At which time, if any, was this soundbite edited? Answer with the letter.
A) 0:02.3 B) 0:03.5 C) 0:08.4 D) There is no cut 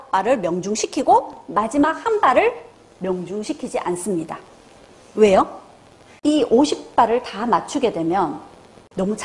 D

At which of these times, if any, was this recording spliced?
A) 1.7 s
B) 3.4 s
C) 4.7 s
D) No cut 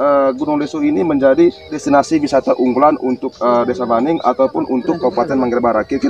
A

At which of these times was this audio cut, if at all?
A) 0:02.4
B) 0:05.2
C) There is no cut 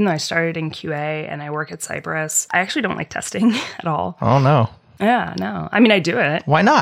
A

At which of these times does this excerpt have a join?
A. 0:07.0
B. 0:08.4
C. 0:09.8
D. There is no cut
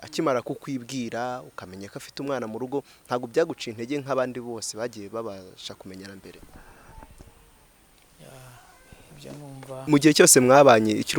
C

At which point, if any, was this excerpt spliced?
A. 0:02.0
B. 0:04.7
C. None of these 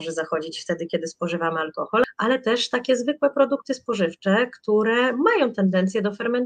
A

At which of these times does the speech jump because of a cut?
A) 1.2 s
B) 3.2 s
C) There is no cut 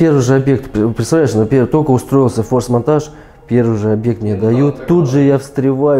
C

